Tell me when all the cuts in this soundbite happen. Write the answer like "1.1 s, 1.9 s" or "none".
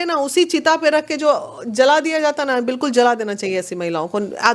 none